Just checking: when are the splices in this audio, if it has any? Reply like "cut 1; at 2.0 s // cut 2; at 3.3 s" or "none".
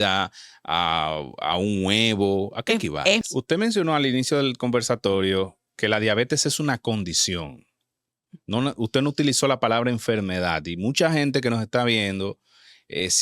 cut 1; at 3.2 s